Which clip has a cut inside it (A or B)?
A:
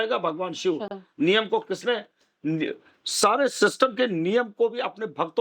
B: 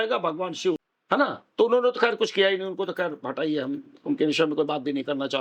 B